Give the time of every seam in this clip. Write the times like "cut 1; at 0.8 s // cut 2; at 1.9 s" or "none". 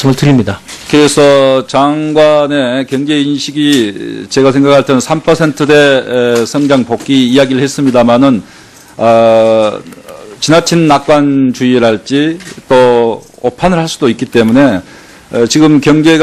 none